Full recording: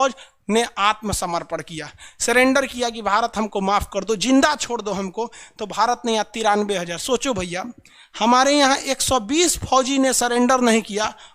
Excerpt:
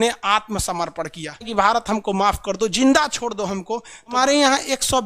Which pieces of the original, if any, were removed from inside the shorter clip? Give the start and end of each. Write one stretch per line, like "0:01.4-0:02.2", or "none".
0:02.0-0:03.0
0:05.6-0:08.3